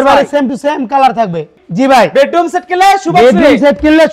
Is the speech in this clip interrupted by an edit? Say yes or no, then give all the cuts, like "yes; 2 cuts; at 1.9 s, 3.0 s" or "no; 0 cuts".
yes; 1 cut; at 1.5 s